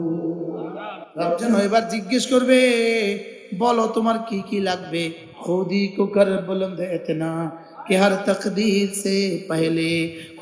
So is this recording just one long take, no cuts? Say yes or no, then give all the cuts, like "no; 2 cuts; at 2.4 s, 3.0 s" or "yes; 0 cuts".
no; 2 cuts; at 0.9 s, 5.3 s